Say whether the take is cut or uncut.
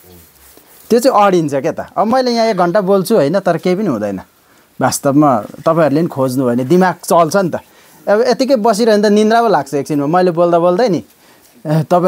uncut